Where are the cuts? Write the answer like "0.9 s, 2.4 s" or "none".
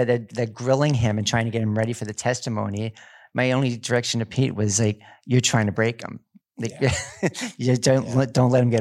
none